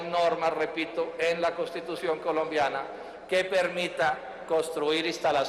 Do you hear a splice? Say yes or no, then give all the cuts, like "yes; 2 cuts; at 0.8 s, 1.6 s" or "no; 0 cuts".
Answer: yes; 1 cut; at 3.5 s